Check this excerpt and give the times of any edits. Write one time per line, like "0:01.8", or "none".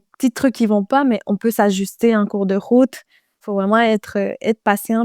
0:03.5